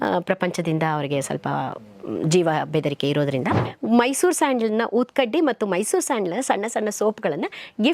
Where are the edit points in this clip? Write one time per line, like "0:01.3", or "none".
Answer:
0:03.7

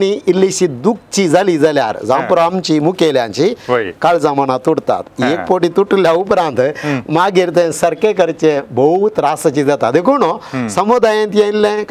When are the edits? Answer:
none

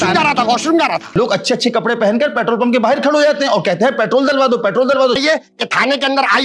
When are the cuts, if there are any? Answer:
0:01.1
0:05.2

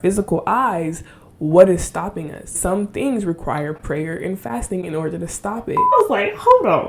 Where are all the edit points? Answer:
0:02.6
0:05.9

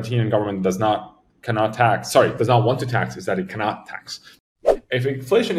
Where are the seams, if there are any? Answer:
0:04.5

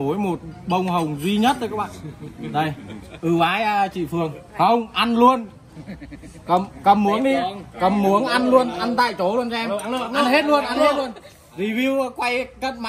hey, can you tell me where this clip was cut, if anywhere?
none

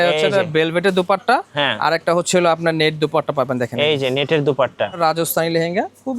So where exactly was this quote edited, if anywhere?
0:05.0

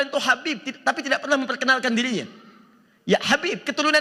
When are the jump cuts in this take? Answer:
none

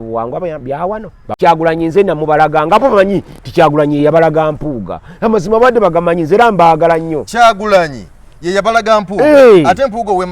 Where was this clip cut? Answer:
0:01.3

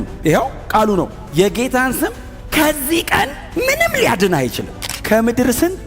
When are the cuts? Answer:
0:04.9

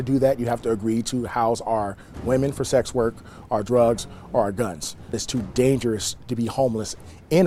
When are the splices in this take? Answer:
0:05.2

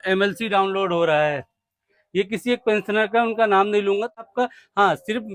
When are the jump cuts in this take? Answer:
0:04.3

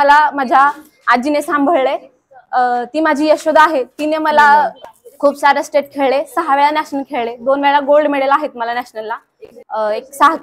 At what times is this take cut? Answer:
0:04.8

